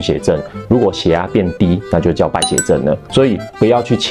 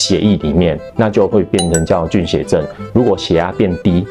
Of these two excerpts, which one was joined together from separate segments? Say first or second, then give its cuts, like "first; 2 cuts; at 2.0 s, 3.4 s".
first; 1 cut; at 3.0 s